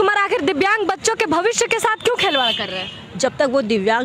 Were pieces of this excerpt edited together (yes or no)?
no